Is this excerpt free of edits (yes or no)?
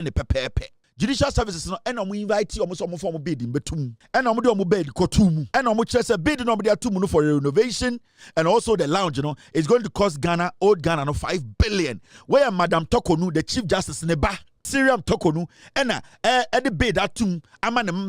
no